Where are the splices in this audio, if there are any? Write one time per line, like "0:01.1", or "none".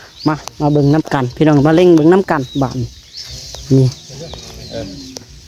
none